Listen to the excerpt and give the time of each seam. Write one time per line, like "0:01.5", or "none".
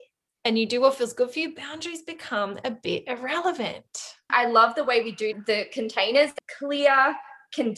0:04.3
0:05.4
0:06.4